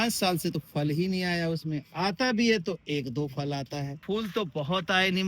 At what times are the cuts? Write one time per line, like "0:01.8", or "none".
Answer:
0:04.0